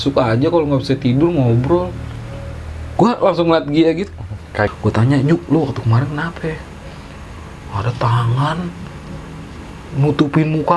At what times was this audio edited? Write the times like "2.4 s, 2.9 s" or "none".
4.7 s